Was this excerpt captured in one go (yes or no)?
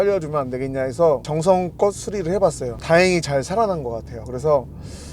no